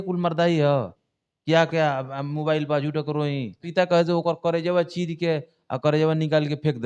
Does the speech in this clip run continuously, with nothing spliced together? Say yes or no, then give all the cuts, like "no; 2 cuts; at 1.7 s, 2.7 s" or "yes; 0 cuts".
no; 1 cut; at 3.6 s